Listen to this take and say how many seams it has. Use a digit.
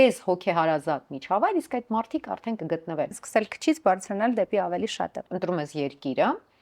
2